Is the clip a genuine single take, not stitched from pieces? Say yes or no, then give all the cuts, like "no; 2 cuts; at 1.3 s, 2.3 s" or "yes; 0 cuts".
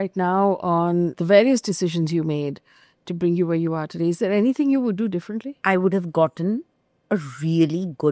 no; 2 cuts; at 1.2 s, 5.6 s